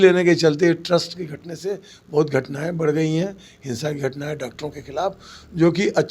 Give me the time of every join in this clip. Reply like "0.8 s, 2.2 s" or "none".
none